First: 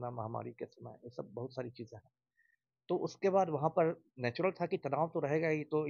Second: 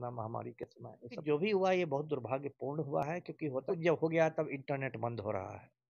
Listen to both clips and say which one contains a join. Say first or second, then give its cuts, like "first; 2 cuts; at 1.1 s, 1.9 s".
second; 2 cuts; at 1.2 s, 3.6 s